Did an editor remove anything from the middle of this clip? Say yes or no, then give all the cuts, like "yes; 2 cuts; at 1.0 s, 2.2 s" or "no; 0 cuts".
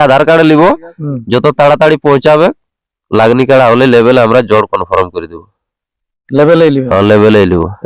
no; 0 cuts